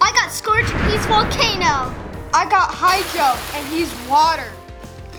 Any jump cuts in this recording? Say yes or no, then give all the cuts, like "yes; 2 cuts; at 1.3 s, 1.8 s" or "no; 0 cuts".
no; 0 cuts